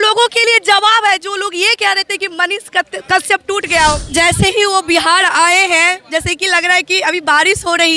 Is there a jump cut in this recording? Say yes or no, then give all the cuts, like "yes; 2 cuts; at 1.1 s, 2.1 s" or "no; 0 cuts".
yes; 1 cut; at 4.0 s